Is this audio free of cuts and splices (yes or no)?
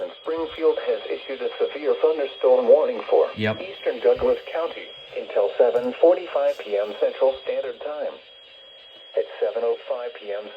no